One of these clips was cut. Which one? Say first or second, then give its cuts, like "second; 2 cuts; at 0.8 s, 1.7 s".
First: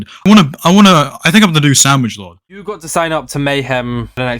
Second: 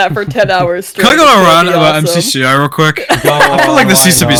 first; 1 cut; at 2.4 s